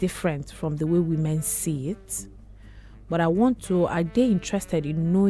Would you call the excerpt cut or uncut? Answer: uncut